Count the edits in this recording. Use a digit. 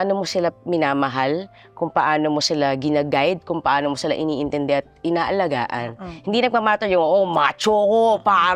0